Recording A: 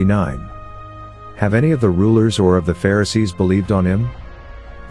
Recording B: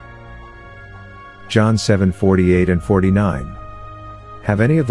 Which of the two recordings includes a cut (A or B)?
B